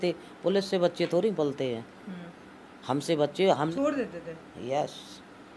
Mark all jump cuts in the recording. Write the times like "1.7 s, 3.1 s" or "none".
3.7 s